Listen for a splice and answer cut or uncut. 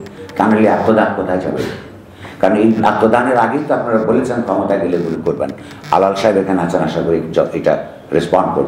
uncut